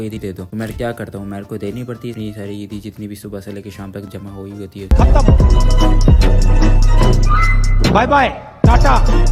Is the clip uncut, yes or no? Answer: yes